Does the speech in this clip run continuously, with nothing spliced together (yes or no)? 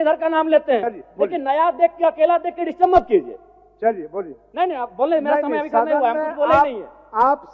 yes